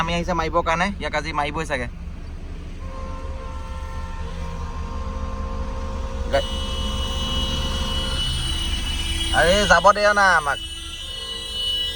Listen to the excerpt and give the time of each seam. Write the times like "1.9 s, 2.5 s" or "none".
none